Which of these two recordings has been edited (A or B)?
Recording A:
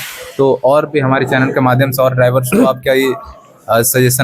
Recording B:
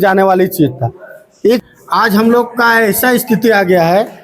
B